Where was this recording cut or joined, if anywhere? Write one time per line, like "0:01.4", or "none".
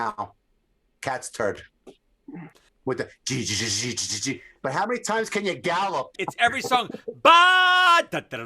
0:02.7
0:06.2